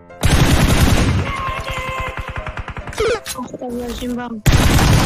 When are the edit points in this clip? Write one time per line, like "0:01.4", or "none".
none